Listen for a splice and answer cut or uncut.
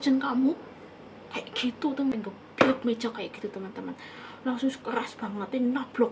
cut